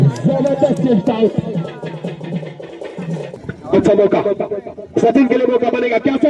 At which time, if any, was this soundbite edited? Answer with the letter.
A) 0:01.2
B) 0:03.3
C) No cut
B